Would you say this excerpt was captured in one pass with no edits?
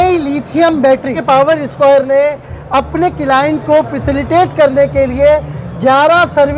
no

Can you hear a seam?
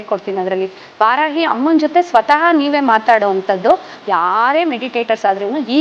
yes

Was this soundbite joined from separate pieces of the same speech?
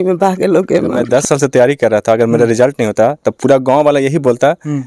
yes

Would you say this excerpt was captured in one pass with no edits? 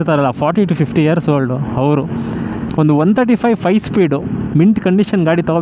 no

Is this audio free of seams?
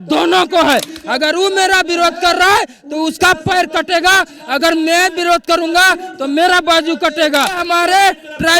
no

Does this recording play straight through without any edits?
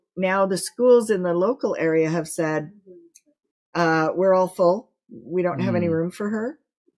yes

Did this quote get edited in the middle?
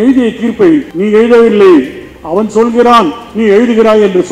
yes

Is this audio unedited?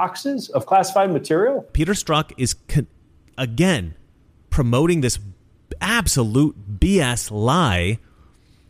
no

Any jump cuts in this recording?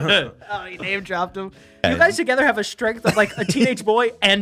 yes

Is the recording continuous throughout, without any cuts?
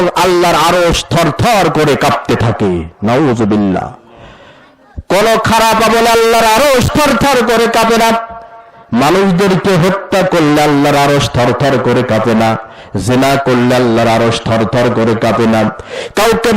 yes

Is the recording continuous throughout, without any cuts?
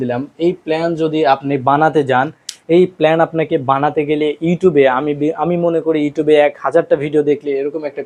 yes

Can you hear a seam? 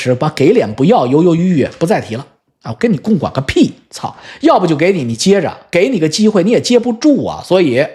no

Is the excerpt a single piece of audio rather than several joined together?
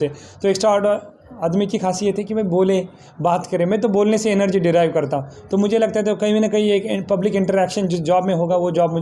yes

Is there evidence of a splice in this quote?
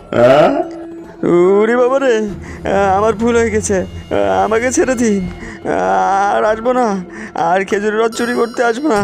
yes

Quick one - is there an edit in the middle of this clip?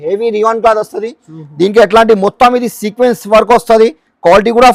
no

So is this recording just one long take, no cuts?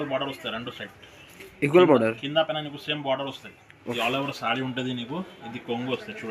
no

